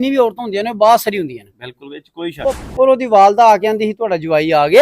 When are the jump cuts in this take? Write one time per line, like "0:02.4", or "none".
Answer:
0:02.4